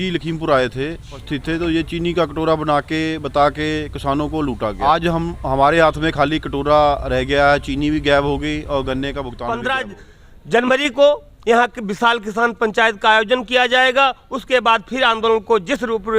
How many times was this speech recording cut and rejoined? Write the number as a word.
three